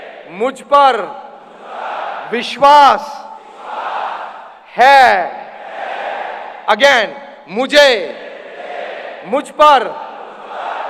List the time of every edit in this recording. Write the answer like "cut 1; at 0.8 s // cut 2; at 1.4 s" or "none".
none